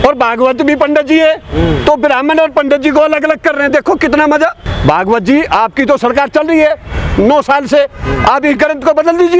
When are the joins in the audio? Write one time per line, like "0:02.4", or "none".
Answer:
0:04.7